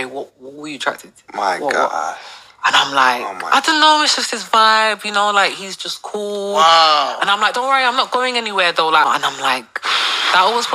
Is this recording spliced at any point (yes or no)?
yes